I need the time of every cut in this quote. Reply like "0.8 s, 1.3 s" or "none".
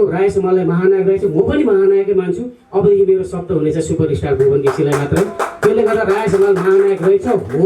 none